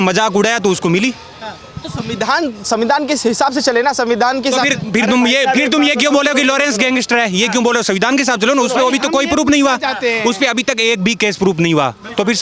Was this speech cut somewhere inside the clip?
no; 0 cuts

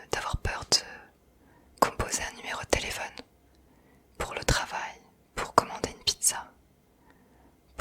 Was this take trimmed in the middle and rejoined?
no; 0 cuts

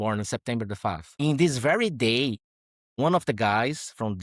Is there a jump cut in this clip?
yes; 1 cut; at 1.1 s

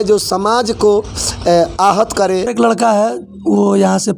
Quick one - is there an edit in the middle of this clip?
yes; 1 cut; at 2.5 s

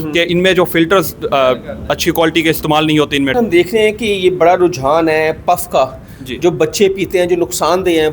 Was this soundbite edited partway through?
yes; 1 cut; at 3.3 s

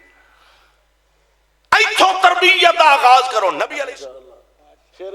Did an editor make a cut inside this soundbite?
yes; 1 cut; at 3.7 s

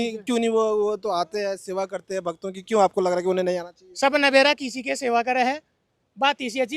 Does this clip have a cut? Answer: no; 0 cuts

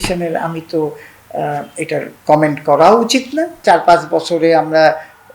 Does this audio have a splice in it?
yes; 1 cut; at 3.6 s

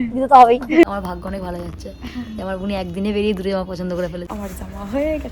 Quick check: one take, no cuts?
no; 2 cuts; at 0.8 s, 4.3 s

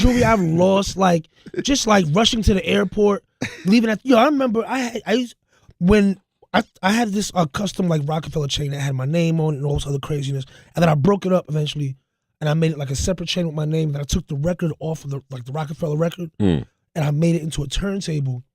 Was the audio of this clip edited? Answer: yes; 1 cut; at 1.7 s

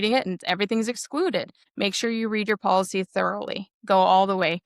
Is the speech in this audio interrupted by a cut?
yes; 1 cut; at 1.6 s

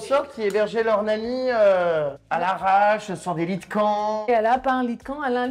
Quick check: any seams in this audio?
yes; 2 cuts; at 2.2 s, 4.3 s

